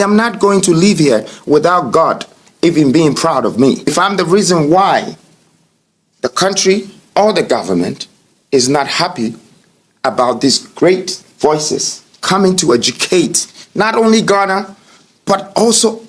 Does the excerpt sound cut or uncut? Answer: cut